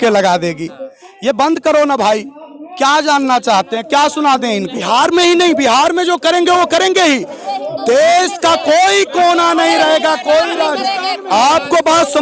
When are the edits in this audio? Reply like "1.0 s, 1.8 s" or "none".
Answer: 4.7 s